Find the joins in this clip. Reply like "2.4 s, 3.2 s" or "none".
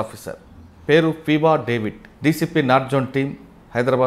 2.0 s